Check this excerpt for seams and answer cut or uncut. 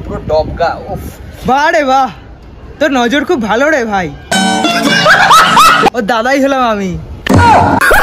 uncut